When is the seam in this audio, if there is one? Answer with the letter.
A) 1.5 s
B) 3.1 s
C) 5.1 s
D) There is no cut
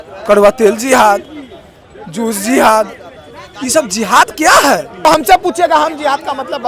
C